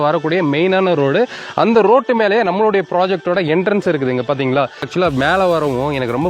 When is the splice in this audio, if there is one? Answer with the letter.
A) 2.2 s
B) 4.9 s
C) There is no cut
B